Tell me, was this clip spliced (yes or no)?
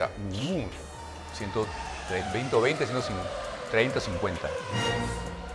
no